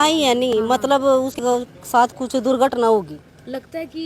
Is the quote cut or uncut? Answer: cut